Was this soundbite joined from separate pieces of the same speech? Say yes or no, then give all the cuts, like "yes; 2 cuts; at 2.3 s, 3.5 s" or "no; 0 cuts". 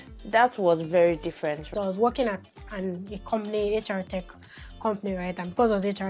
yes; 1 cut; at 1.7 s